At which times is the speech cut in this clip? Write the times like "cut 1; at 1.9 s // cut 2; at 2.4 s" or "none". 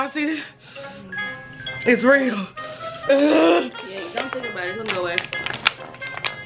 cut 1; at 3.0 s